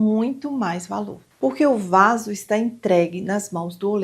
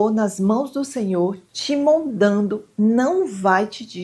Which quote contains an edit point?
first; 1 cut; at 1.2 s

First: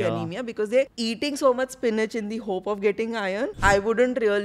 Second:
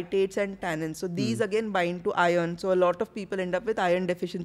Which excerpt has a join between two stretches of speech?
first; 2 cuts; at 0.9 s, 3.6 s

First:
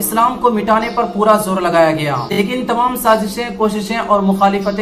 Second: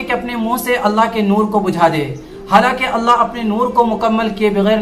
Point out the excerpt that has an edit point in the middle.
first; 1 cut; at 2.3 s

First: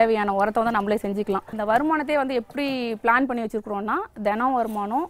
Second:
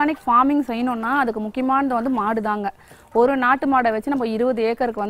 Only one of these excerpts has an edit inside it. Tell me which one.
first; 1 cut; at 1.5 s

